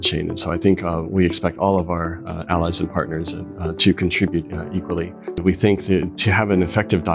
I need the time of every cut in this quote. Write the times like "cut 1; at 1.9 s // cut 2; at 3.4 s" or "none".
cut 1; at 5.4 s